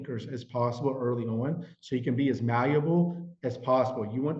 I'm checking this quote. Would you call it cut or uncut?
uncut